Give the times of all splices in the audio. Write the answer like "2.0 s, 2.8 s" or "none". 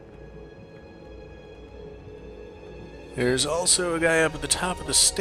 none